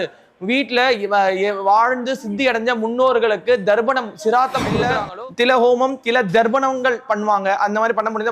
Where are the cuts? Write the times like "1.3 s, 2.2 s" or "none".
4.9 s

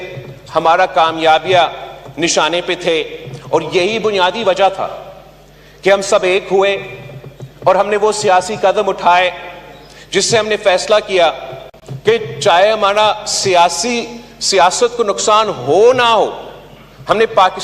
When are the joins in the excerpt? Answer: none

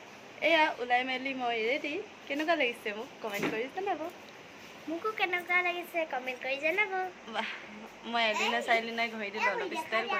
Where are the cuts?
none

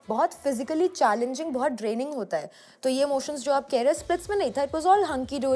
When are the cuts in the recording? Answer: none

